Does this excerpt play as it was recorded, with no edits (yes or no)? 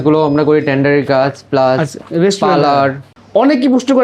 no